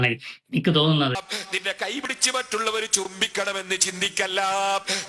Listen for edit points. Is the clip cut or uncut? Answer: cut